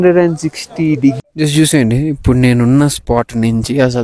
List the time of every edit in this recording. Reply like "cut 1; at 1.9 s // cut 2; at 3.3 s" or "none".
cut 1; at 1.2 s